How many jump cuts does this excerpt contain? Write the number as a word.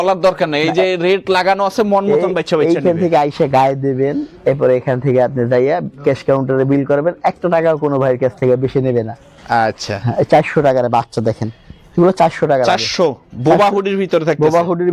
zero